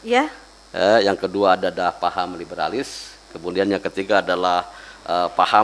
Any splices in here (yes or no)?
no